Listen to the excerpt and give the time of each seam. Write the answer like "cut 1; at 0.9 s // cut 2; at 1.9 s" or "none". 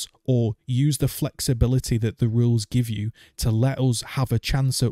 none

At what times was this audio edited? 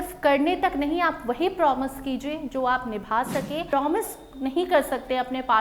cut 1; at 3.7 s

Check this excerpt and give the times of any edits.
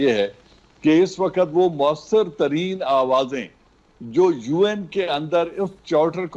none

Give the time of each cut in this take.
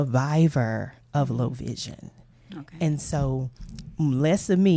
none

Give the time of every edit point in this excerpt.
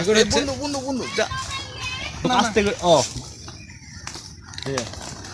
cut 1; at 2.3 s

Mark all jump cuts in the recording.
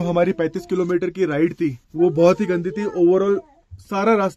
cut 1; at 1.8 s

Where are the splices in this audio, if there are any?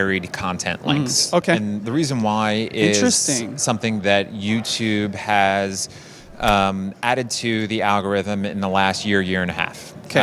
none

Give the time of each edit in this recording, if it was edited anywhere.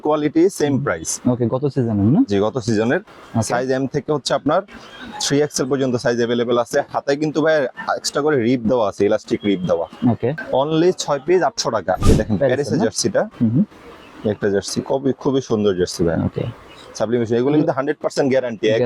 cut 1; at 10.4 s // cut 2; at 12.0 s

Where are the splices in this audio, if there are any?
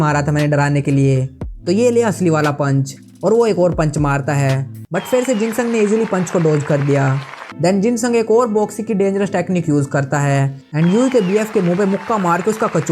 cut 1; at 7.4 s

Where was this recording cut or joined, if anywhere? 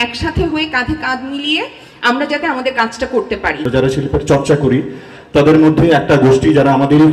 cut 1; at 3.6 s

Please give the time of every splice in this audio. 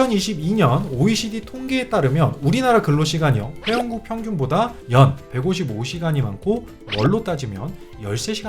none

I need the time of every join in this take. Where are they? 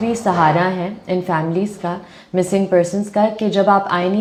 none

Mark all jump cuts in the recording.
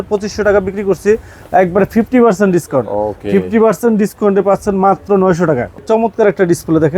cut 1; at 5.8 s

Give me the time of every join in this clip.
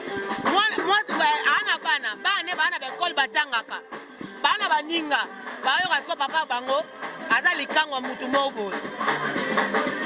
none

